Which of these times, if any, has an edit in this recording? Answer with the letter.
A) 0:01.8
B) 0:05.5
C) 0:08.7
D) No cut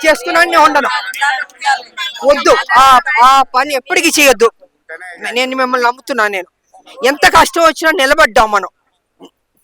D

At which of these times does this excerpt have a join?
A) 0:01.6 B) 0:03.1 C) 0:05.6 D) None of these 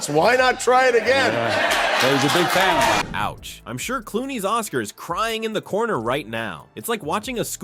D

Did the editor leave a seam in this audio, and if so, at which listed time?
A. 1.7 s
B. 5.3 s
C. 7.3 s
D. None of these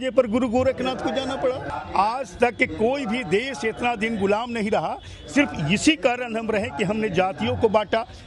A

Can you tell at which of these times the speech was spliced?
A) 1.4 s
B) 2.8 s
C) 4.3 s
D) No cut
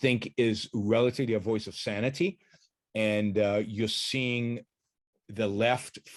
D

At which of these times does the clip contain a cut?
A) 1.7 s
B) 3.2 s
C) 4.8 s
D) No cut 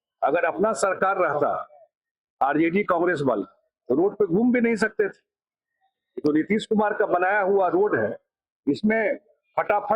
D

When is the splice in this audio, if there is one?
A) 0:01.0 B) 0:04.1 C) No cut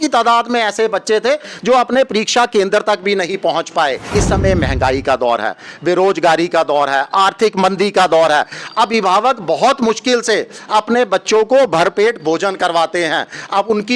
B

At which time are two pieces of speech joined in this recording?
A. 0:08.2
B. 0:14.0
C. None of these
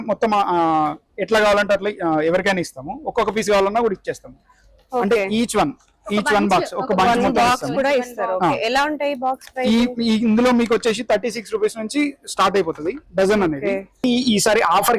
B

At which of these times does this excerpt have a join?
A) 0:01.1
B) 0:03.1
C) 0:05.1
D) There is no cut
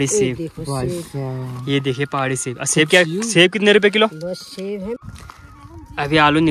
C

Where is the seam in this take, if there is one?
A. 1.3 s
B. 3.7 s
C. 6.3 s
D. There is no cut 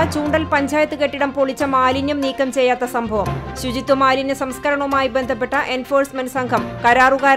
D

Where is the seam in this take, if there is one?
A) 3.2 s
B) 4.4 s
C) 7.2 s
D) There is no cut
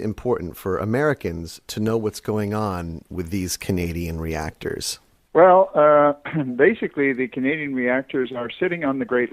A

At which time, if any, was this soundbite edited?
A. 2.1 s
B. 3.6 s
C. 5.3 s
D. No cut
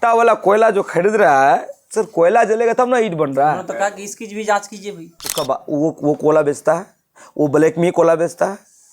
C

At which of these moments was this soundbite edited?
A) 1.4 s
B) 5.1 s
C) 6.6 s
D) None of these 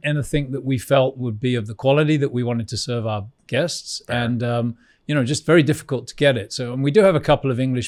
D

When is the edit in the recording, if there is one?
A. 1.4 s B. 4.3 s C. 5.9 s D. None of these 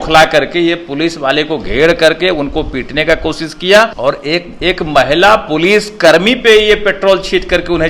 B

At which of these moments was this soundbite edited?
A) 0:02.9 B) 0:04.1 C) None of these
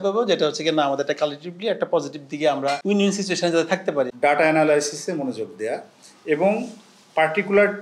B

